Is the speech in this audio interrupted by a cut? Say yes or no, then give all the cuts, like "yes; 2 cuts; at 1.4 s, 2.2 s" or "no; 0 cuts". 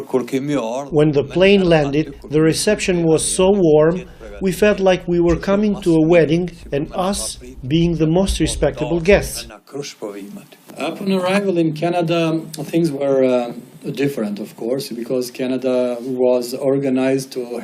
yes; 1 cut; at 8.9 s